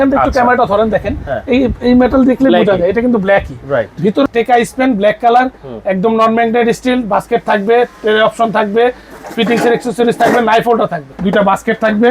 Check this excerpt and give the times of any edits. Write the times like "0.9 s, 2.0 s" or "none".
4.3 s, 11.1 s